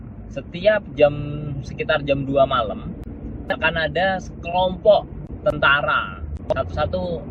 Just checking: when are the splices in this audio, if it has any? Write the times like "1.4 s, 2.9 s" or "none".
6.4 s